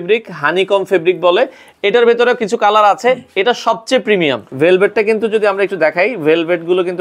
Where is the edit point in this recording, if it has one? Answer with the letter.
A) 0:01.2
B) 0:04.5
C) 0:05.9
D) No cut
B